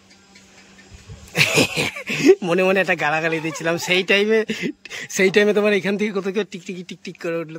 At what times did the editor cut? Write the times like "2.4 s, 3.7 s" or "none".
none